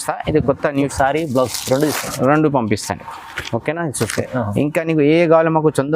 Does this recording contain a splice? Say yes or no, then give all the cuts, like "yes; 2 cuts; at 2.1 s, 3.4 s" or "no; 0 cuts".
yes; 1 cut; at 0.9 s